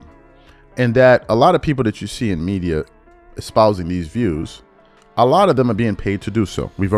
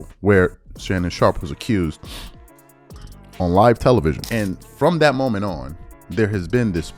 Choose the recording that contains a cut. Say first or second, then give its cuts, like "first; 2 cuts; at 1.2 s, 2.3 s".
second; 1 cut; at 4.2 s